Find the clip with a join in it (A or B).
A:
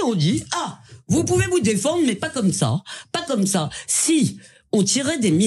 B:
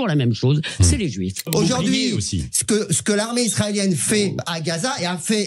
B